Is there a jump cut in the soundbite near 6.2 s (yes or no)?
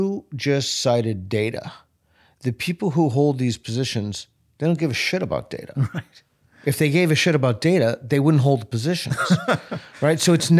no